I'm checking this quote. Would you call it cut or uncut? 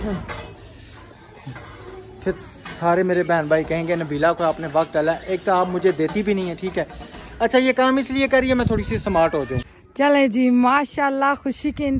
cut